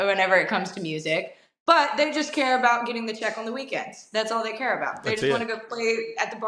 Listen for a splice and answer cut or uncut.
uncut